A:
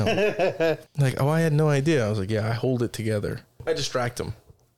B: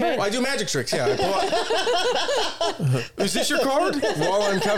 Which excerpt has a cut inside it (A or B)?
A